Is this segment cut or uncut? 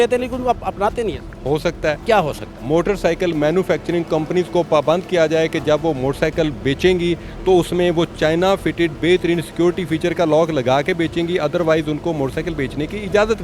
uncut